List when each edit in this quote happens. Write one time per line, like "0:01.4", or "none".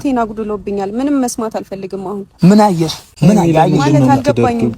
0:03.0